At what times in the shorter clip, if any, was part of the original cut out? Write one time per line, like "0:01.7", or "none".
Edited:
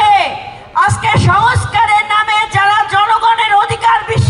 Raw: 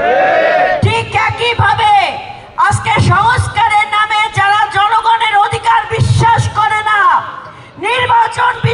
none